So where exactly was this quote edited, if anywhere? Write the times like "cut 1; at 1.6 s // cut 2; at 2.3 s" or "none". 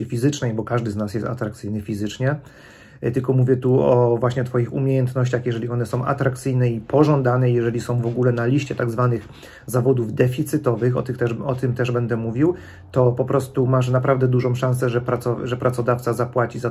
none